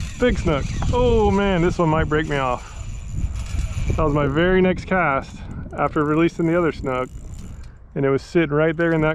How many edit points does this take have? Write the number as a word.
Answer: zero